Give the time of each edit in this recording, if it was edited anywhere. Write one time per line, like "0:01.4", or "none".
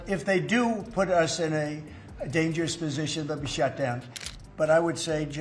0:04.1